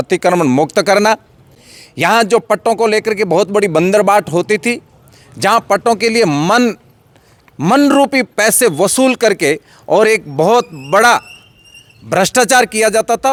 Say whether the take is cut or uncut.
uncut